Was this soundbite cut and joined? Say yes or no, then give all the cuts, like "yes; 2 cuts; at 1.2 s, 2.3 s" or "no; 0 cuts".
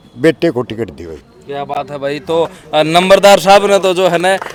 no; 0 cuts